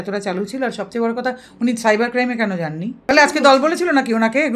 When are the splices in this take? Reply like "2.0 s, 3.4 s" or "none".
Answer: 3.1 s